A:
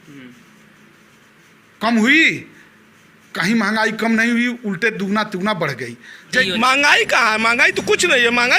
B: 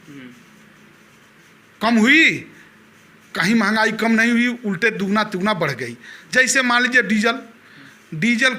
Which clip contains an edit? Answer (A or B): A